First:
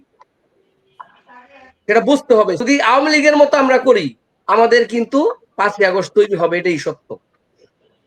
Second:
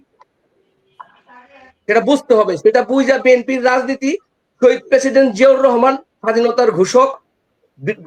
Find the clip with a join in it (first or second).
first